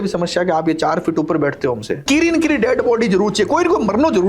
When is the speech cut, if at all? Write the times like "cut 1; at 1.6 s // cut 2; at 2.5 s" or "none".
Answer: cut 1; at 2.0 s